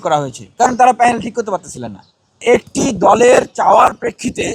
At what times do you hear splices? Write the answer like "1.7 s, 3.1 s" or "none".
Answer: 2.4 s